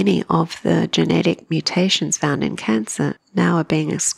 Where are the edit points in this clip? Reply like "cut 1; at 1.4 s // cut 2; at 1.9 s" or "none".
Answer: cut 1; at 3.2 s